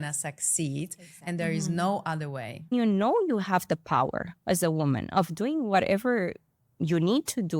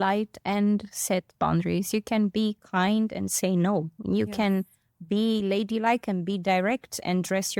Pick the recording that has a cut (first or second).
first